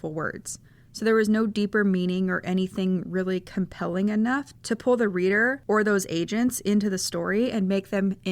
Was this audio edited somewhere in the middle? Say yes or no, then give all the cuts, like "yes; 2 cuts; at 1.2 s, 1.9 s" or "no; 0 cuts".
yes; 1 cut; at 4.5 s